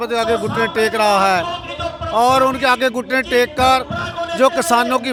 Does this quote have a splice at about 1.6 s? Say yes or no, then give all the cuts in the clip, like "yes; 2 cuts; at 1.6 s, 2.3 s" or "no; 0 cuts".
no; 0 cuts